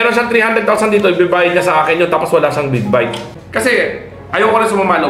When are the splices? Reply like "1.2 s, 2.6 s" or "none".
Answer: 3.4 s